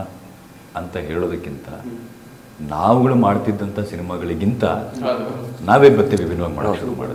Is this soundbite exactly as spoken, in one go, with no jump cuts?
yes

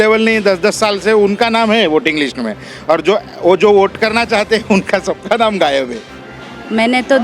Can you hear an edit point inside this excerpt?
yes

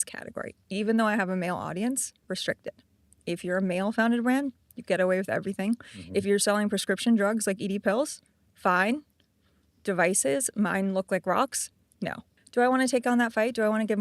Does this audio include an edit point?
yes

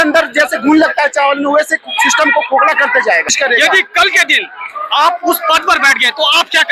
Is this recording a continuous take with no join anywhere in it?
no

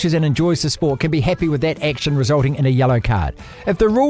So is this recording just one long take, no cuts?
yes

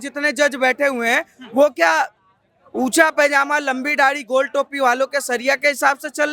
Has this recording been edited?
no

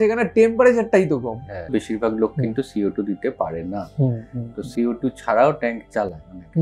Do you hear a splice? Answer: yes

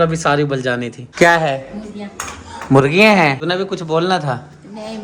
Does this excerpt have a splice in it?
yes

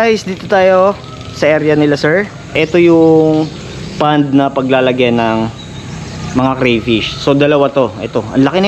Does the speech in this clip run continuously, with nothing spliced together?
no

